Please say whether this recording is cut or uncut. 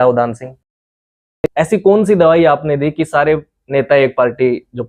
cut